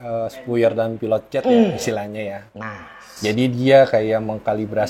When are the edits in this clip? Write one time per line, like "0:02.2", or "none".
none